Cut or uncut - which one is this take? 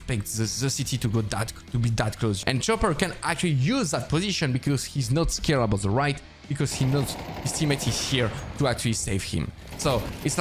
cut